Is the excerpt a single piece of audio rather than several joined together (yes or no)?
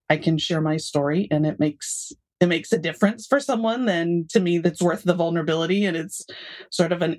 no